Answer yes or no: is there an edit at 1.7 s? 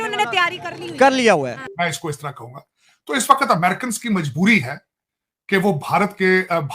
yes